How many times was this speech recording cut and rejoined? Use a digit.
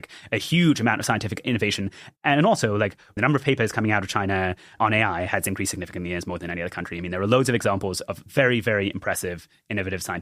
3